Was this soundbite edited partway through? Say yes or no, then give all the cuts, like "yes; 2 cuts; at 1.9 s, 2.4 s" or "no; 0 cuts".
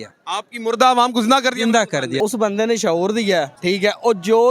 yes; 2 cuts; at 2.2 s, 3.5 s